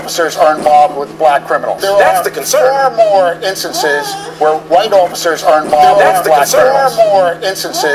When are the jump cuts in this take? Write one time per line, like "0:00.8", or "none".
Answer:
none